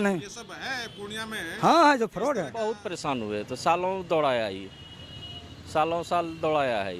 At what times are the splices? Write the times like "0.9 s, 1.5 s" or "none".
2.5 s